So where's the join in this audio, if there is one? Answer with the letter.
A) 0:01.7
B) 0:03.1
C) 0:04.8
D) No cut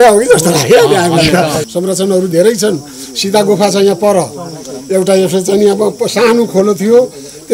A